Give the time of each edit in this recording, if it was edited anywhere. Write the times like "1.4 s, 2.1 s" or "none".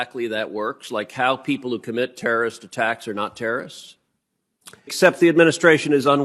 4.9 s